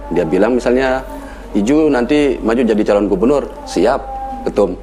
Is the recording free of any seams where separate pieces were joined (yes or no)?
yes